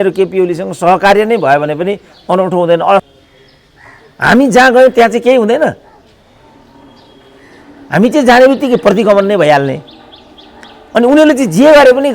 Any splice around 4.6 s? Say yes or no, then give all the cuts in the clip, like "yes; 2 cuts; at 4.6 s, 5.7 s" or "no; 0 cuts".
no; 1 cut; at 3.1 s